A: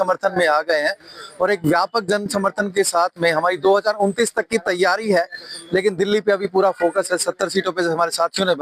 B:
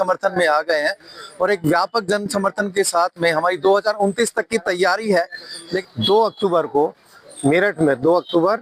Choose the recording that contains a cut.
B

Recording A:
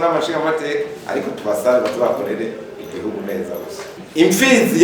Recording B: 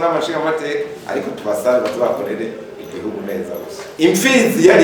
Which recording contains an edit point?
B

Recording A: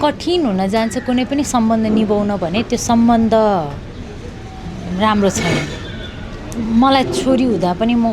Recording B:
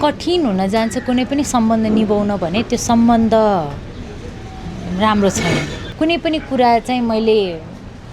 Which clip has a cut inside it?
B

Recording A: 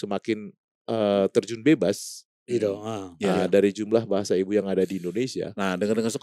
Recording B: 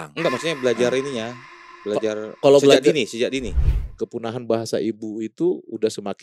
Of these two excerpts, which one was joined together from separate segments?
B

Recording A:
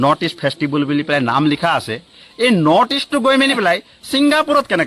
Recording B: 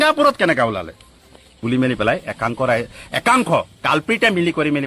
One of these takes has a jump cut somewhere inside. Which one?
B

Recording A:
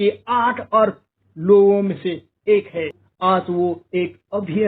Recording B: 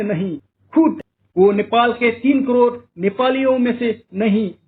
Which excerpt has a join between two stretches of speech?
B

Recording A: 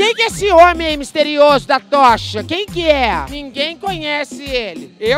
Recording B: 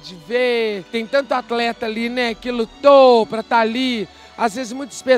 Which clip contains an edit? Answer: A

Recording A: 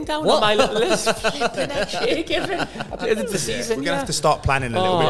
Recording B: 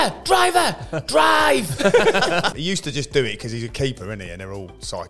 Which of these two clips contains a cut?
B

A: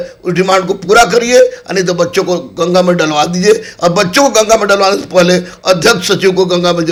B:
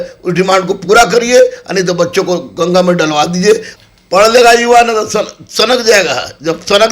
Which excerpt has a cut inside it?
B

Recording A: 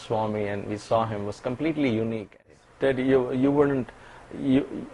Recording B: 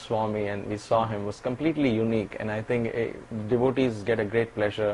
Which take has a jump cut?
A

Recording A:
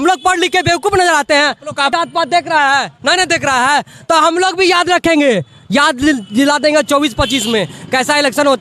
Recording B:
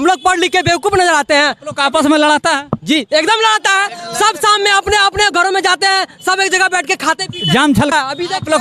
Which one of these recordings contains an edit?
A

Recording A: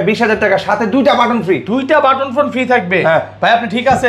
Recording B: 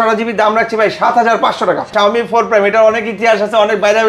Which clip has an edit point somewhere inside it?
B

